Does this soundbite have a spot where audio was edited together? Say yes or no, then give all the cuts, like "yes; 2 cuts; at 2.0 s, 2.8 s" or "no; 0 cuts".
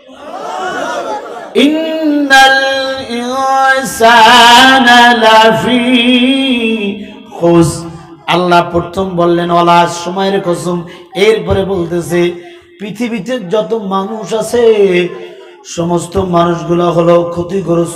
no; 0 cuts